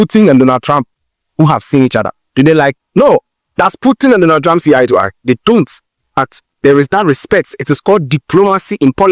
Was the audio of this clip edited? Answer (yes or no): no